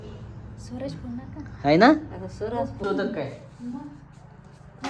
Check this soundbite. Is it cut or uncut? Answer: cut